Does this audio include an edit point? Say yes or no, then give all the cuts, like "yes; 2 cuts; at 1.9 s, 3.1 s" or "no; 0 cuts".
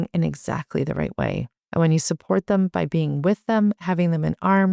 yes; 1 cut; at 1.5 s